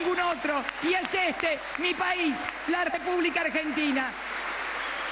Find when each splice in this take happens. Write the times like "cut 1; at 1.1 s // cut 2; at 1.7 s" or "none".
cut 1; at 4.2 s